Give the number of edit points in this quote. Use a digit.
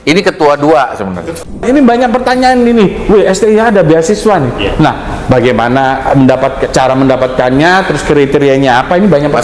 1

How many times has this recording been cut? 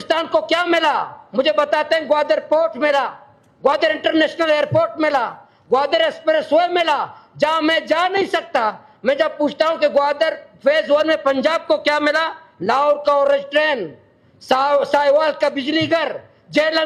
0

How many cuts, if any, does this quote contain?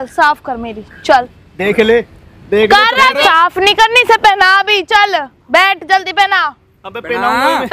1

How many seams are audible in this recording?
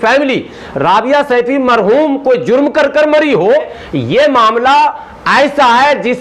1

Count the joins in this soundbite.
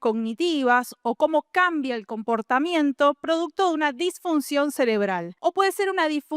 1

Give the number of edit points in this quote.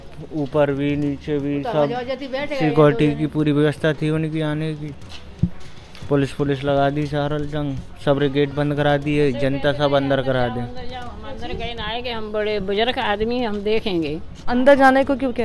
1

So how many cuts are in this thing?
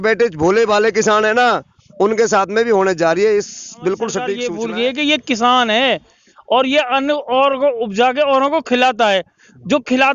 1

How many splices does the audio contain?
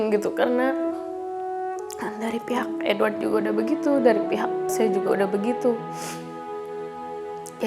0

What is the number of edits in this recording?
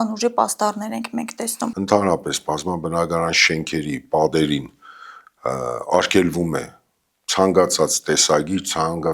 1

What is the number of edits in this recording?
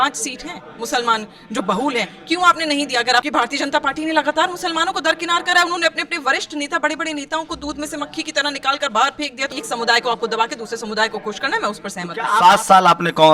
3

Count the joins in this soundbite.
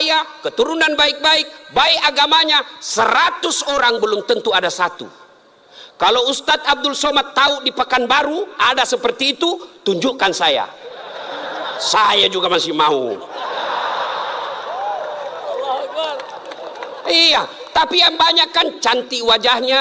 0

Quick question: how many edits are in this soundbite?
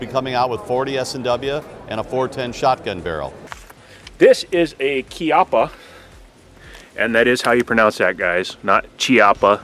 1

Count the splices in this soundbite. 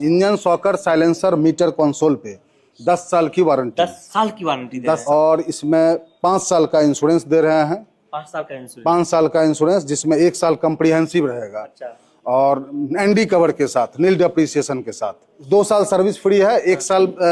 0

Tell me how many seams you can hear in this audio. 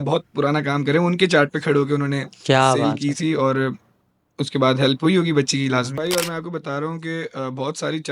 1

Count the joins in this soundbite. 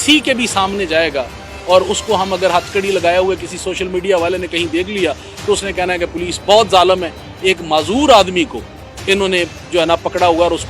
0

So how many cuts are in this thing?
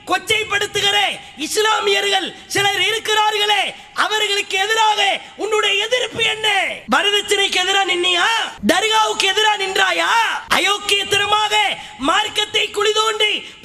0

